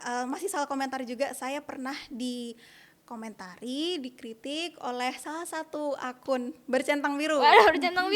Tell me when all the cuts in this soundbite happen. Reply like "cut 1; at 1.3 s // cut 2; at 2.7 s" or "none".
none